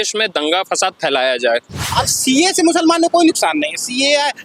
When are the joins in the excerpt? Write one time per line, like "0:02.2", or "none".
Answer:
0:01.8